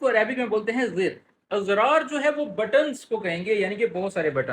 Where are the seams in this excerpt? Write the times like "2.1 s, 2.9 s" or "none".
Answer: 1.4 s